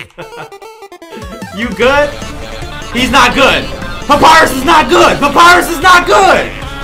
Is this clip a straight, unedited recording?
yes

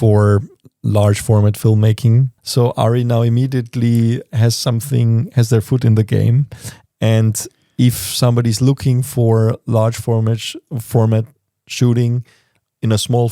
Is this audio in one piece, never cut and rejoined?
no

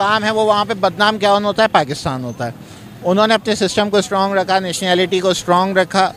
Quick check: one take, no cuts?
yes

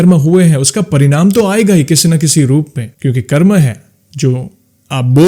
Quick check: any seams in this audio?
no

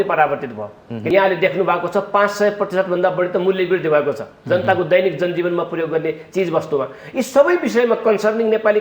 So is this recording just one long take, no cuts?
no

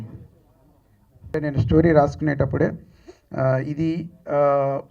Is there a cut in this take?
yes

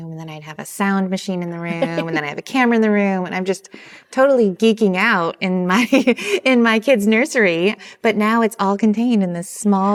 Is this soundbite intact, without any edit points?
yes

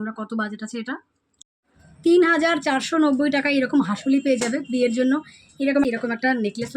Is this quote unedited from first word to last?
no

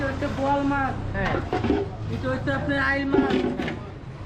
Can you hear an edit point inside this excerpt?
no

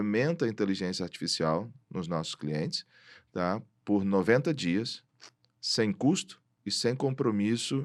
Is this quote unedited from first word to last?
yes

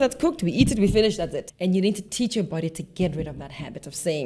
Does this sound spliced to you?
yes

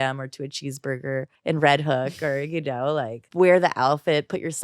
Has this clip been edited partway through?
yes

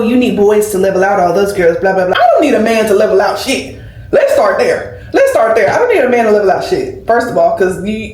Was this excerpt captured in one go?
yes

